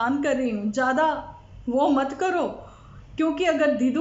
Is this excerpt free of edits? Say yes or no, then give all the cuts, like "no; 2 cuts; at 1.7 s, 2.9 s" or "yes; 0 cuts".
yes; 0 cuts